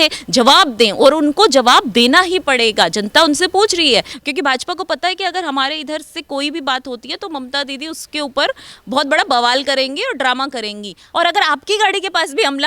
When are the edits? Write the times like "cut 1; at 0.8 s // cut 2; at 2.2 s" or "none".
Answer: cut 1; at 4.1 s // cut 2; at 11.0 s